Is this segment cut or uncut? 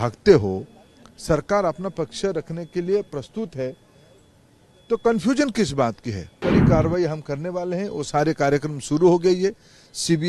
cut